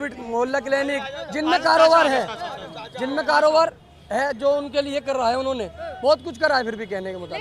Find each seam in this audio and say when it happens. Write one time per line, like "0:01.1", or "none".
none